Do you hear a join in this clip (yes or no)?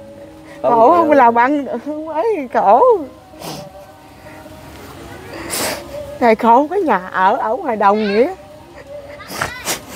no